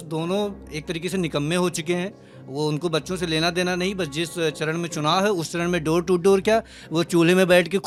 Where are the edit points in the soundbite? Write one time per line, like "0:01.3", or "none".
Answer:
none